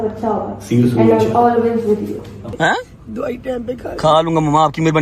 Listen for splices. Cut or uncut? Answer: cut